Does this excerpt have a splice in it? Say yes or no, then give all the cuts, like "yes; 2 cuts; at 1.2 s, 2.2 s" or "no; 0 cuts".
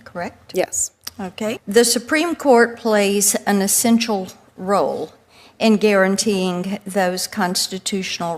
yes; 1 cut; at 1.5 s